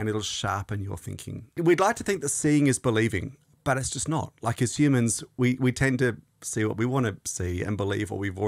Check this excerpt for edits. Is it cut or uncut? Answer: cut